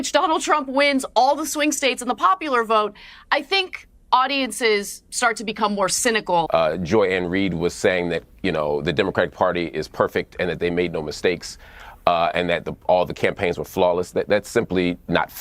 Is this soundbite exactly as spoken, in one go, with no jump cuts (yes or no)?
no